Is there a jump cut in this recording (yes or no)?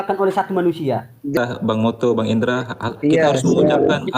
yes